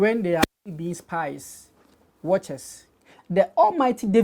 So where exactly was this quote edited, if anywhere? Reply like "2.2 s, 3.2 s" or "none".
3.1 s